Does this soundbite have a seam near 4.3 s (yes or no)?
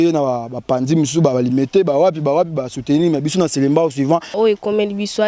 yes